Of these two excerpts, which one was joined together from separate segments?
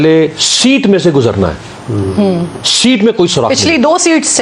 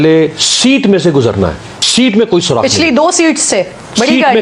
second; 1 cut; at 1.7 s

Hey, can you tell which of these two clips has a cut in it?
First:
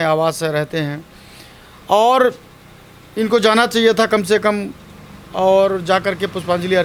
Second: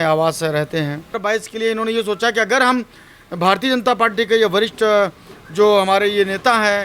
second; 1 cut; at 1.1 s

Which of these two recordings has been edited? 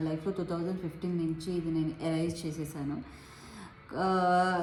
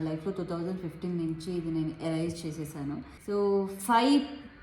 second; 1 cut; at 3.1 s

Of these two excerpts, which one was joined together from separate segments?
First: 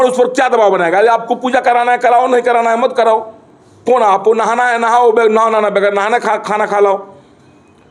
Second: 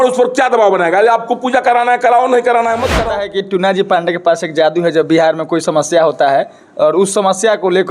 second; 1 cut; at 3.0 s

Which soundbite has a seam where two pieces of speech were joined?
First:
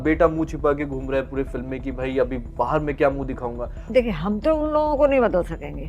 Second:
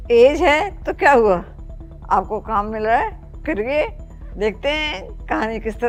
first; 1 cut; at 3.8 s

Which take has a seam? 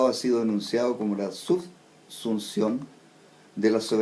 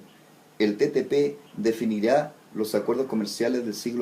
second; 1 cut; at 1.1 s

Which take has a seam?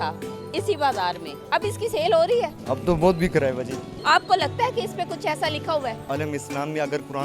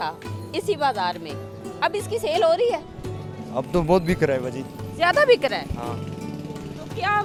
first; 4 cuts; at 1.3 s, 2.6 s, 3.9 s, 6.1 s

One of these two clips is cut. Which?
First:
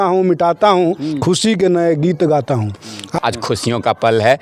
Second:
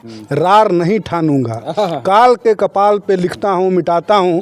first; 1 cut; at 3.2 s

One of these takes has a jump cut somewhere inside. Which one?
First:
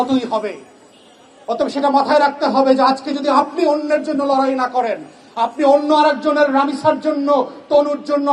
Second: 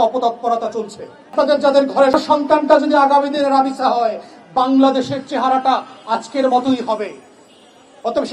second; 1 cut; at 1.3 s

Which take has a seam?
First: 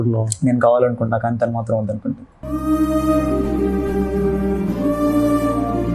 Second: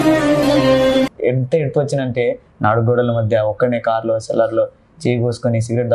second; 1 cut; at 1.1 s

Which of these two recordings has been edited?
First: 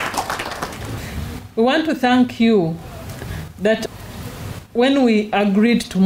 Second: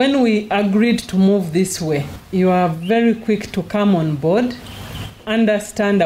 second; 1 cut; at 2.2 s

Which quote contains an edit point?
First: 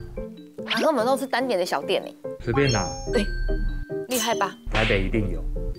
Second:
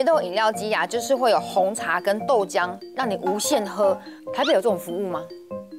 first; 2 cuts; at 2.3 s, 4.6 s

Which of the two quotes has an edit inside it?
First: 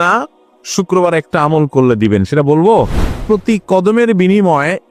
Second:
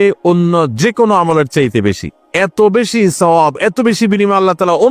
first; 1 cut; at 3.2 s

